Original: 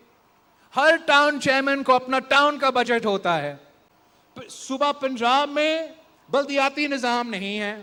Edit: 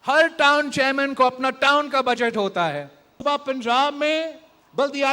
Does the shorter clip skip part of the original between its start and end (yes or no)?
yes